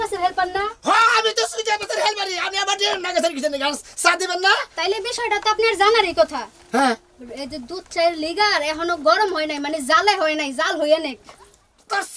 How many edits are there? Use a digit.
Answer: 0